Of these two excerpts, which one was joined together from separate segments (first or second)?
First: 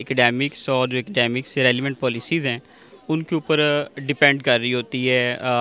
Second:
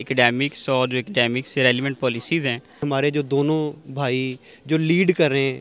second